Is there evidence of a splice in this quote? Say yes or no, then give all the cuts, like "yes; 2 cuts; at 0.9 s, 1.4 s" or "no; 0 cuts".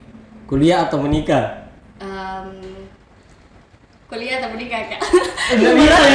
no; 0 cuts